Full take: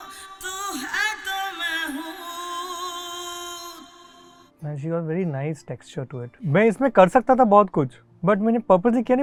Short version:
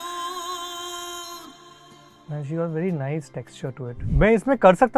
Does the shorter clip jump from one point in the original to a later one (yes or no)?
no